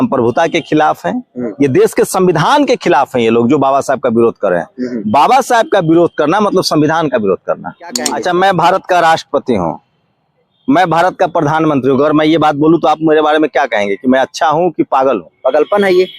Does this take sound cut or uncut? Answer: cut